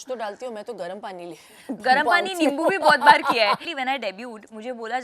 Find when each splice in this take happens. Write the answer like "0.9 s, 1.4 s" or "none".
3.6 s